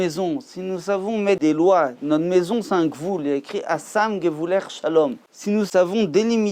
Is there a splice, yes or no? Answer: yes